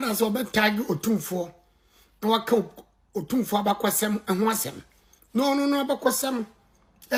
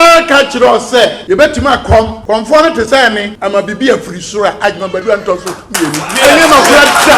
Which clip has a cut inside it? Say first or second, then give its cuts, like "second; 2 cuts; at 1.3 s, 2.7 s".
second; 3 cuts; at 1.2 s, 2.2 s, 3.3 s